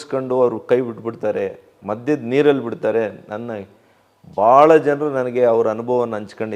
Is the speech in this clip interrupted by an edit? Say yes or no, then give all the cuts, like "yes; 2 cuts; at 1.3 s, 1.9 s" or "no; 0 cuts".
yes; 1 cut; at 1.7 s